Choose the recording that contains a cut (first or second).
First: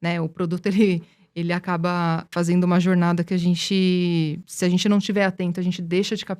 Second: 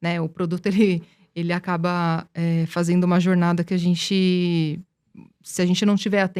first